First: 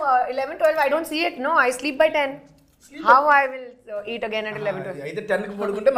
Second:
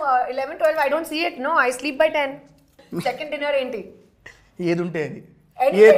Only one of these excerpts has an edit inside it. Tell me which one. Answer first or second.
second